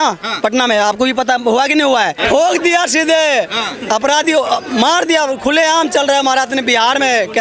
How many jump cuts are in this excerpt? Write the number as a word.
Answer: zero